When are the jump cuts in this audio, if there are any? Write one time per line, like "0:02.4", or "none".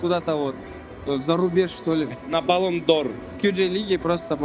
0:02.1
0:03.2